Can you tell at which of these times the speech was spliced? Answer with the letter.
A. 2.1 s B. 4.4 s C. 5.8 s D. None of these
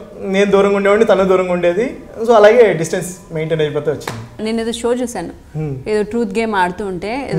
B